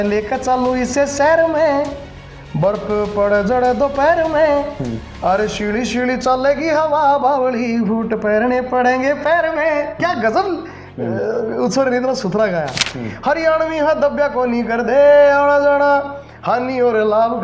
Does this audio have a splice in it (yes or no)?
no